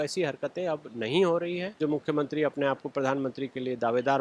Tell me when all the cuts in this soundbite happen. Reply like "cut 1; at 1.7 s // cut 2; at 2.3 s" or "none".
cut 1; at 1.8 s